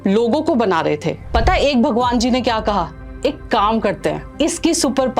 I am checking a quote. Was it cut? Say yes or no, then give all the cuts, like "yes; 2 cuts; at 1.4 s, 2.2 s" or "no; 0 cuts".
yes; 2 cuts; at 1.2 s, 4.3 s